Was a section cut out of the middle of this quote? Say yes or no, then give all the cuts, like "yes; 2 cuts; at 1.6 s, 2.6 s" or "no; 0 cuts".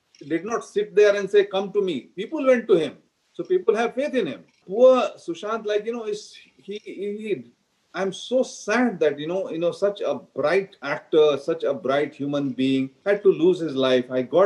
yes; 3 cuts; at 4.6 s, 10.9 s, 12.9 s